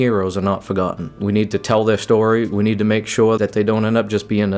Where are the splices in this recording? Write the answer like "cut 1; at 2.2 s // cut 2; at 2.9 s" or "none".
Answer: cut 1; at 1.2 s // cut 2; at 3.4 s